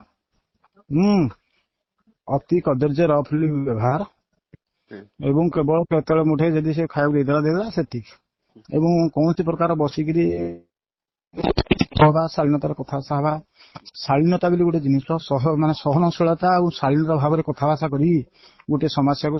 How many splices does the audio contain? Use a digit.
0